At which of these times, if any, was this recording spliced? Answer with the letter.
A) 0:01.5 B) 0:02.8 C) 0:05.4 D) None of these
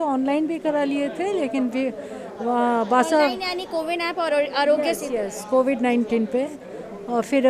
D